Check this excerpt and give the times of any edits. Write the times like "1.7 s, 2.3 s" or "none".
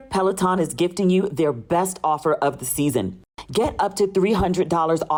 none